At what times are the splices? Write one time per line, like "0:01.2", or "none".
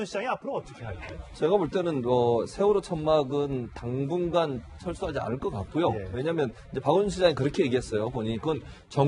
none